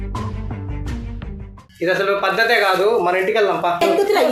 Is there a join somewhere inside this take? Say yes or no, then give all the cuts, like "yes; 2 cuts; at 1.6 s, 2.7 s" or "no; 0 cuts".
yes; 1 cut; at 1.6 s